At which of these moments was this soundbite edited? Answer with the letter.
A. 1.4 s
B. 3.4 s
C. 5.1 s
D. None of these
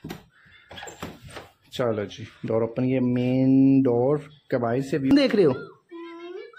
C